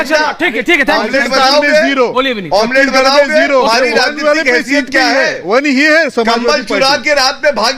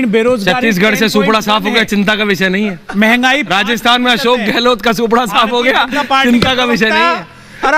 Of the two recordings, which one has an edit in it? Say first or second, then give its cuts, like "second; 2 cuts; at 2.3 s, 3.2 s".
first; 1 cut; at 3.7 s